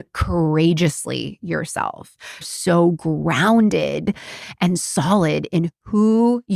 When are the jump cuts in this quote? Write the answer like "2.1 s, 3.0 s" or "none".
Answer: 2.4 s